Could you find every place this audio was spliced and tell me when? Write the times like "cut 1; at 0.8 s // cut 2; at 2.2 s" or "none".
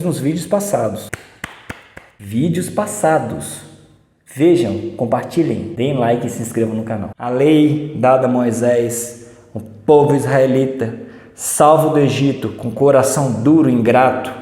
cut 1; at 7.0 s